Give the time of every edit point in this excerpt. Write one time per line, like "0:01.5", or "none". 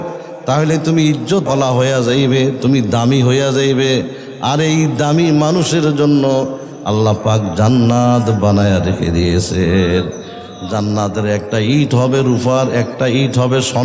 0:01.4

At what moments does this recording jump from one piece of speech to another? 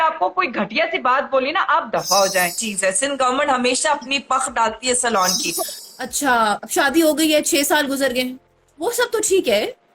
0:02.6
0:05.7

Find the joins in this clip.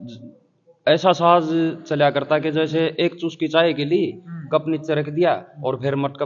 none

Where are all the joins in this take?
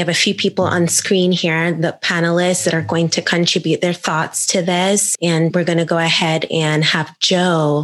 0:05.5

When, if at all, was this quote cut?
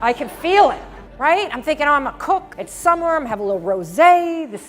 0:01.0

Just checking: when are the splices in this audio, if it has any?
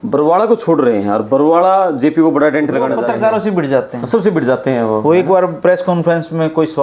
0:02.9

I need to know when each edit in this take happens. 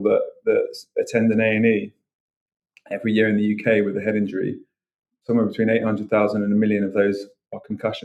none

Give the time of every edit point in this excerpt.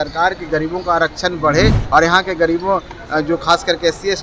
0:01.8

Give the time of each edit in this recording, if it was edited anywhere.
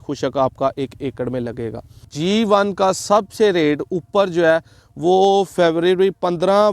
0:02.1

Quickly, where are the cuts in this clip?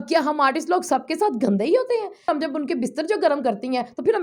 0:02.3

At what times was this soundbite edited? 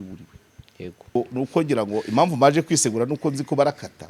0:01.1

